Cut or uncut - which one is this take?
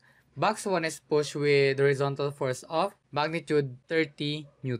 cut